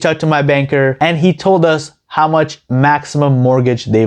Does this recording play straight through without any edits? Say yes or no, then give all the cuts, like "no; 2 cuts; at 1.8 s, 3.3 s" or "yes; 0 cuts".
no; 1 cut; at 1.0 s